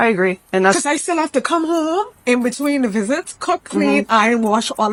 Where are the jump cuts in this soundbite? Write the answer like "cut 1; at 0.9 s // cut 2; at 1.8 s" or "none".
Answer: none